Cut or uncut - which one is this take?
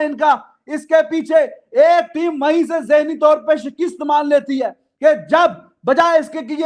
uncut